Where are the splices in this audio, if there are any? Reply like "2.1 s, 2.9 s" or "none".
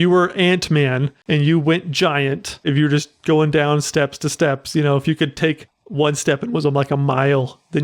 1.1 s, 2.6 s